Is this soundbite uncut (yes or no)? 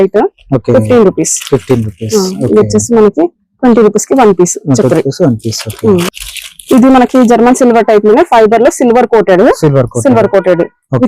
no